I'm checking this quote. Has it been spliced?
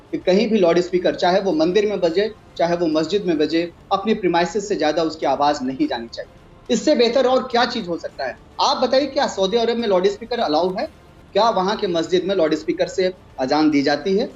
yes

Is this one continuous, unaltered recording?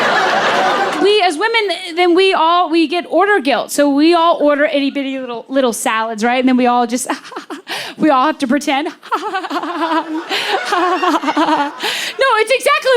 no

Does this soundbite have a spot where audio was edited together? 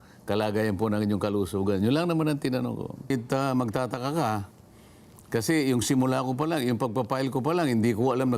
yes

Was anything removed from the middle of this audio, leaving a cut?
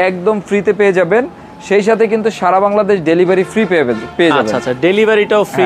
no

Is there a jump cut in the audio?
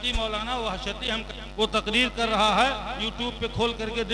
yes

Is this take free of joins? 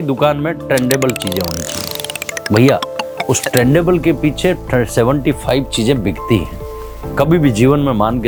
yes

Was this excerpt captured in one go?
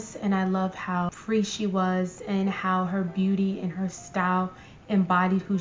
yes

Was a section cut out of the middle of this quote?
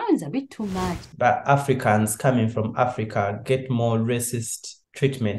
yes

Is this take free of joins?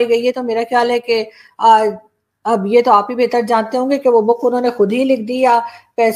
yes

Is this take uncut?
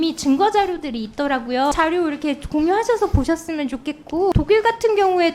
no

